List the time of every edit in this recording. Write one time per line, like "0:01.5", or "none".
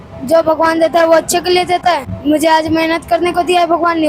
0:02.1